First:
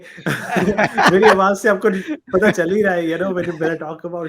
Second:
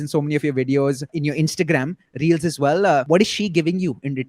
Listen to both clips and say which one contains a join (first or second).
second